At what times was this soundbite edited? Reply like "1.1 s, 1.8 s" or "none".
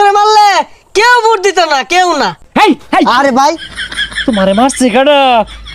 2.4 s